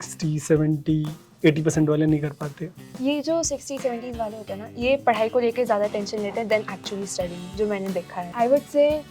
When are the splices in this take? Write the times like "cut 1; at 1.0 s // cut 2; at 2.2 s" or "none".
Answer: none